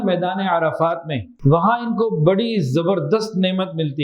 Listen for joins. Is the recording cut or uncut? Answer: cut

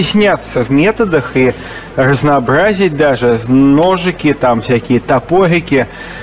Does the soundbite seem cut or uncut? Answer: uncut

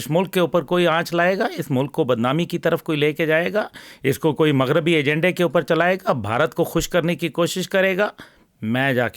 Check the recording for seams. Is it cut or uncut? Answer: uncut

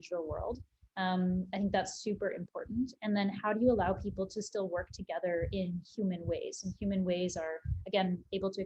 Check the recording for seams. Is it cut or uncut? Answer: uncut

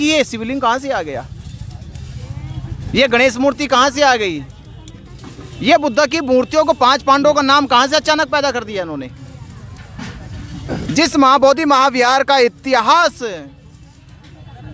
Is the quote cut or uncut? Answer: uncut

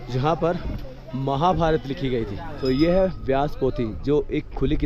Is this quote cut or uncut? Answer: cut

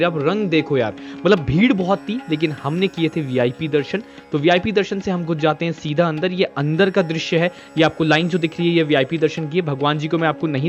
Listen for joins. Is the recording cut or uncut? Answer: uncut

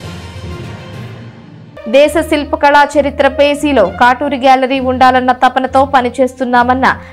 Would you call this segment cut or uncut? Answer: cut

